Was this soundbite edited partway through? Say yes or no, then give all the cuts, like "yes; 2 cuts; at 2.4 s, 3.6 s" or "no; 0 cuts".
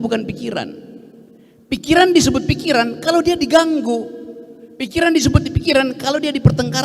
no; 0 cuts